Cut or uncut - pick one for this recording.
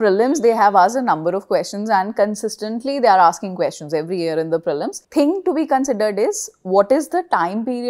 cut